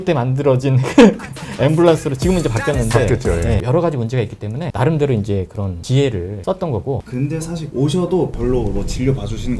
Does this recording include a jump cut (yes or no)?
no